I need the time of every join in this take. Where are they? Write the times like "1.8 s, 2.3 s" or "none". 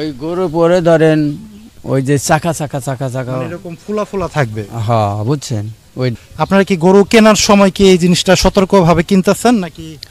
6.2 s